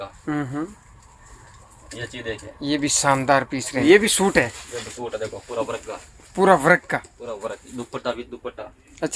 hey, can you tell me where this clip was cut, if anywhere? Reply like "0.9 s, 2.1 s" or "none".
3.8 s